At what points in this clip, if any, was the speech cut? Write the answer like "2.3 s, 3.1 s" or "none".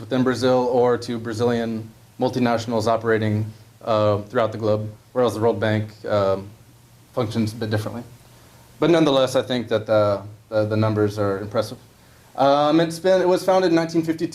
11.1 s